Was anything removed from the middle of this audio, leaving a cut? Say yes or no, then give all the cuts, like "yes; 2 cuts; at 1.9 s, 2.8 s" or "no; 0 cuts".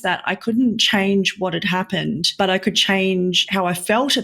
yes; 2 cuts; at 2.3 s, 3.4 s